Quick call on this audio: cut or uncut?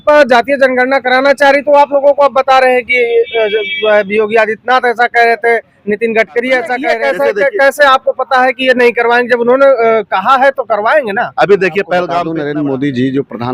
cut